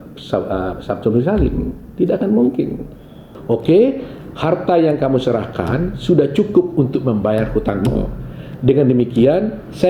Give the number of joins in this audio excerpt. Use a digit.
1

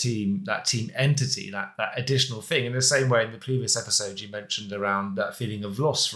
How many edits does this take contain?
0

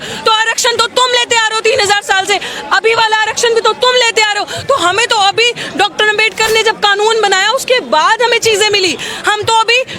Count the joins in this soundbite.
0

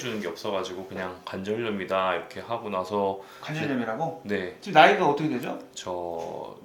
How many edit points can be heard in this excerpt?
0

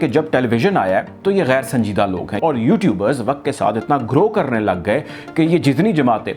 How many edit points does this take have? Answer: 1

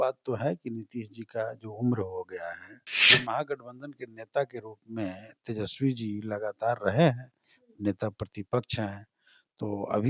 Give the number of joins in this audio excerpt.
1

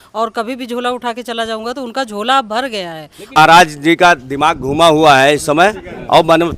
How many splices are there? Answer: 1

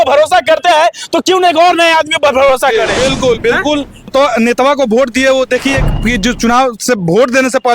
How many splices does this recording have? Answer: 1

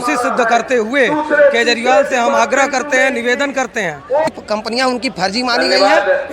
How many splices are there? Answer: 1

